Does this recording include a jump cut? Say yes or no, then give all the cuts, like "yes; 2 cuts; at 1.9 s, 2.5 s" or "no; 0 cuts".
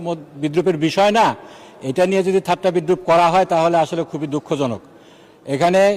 no; 0 cuts